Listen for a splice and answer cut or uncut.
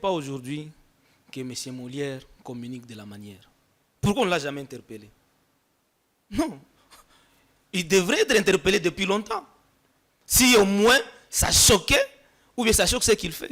uncut